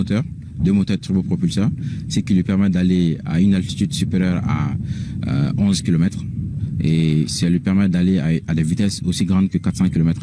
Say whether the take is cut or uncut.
uncut